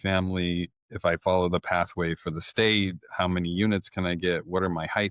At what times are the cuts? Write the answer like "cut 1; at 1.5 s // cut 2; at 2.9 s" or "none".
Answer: none